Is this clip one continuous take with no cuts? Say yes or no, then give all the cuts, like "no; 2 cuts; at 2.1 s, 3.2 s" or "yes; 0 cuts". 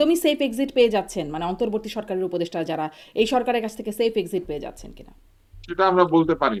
yes; 0 cuts